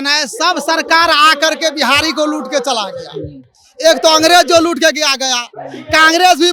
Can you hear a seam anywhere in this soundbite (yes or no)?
no